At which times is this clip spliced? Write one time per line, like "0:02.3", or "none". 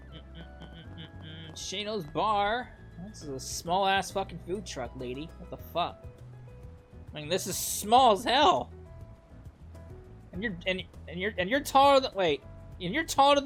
none